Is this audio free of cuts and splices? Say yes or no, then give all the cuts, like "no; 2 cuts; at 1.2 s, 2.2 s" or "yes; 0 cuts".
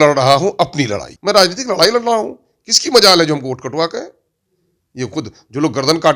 no; 1 cut; at 1.1 s